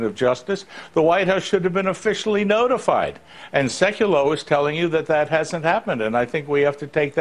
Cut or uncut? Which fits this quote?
uncut